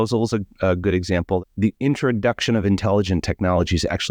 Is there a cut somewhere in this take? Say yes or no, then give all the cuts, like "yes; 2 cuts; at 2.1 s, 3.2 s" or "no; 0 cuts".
yes; 1 cut; at 1.4 s